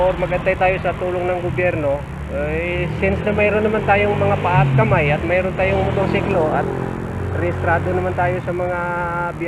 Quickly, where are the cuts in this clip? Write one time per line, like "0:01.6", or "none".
none